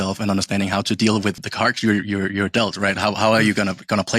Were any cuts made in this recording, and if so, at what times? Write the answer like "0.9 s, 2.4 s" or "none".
1.4 s